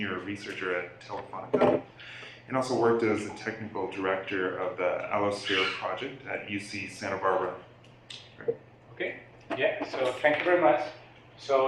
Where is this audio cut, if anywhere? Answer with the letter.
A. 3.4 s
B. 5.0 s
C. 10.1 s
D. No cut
D